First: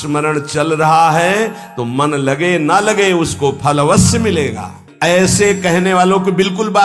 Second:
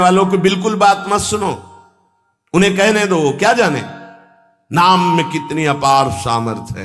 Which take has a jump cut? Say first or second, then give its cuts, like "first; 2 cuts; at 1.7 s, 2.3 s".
first; 1 cut; at 4.8 s